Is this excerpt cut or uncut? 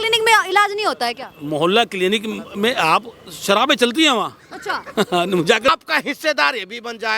cut